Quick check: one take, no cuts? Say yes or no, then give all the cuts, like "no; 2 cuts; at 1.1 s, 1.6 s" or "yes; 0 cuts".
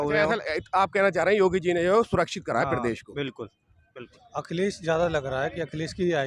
no; 1 cut; at 4.0 s